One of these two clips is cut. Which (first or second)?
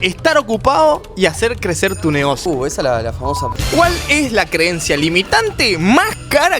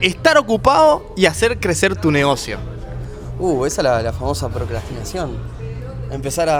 first